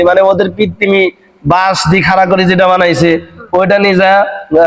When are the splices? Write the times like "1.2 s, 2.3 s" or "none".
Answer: none